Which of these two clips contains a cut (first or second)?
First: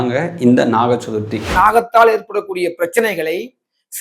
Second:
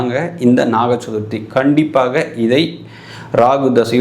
first